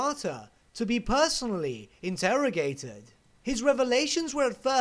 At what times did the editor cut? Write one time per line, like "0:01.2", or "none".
0:03.3